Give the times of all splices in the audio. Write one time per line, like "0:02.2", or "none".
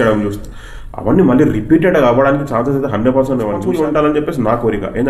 0:03.6